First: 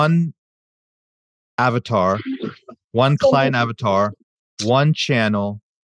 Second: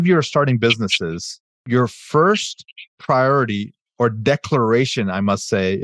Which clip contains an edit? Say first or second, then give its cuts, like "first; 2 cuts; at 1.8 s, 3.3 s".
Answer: second; 1 cut; at 1.6 s